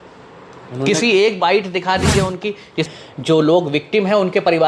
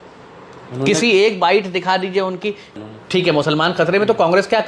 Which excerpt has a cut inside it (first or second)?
first